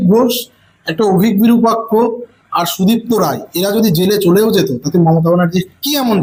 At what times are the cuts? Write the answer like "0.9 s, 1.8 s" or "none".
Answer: none

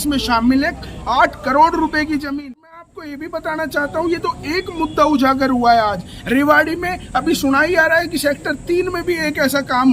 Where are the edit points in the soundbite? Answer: 2.9 s

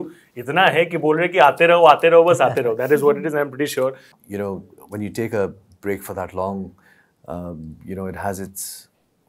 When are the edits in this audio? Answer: 4.1 s

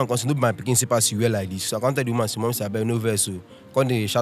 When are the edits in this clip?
none

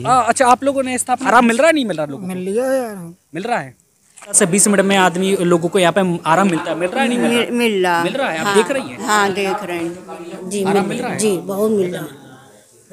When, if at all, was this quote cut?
1.2 s, 4.4 s, 10.4 s

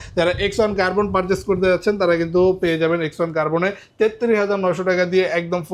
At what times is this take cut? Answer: none

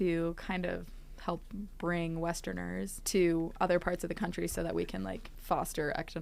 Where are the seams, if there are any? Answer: 3.0 s, 5.3 s

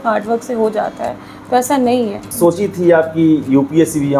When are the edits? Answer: 2.2 s

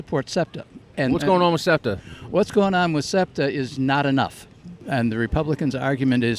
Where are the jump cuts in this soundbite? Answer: 0.9 s, 4.8 s

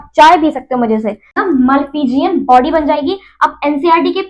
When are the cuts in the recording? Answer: 1.4 s

